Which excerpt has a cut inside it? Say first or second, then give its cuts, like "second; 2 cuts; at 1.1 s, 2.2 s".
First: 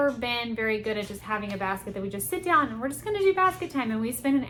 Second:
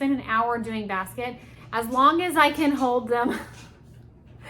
second; 1 cut; at 1.6 s